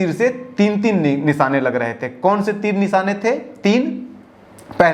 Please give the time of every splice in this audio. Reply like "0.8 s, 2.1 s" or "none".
none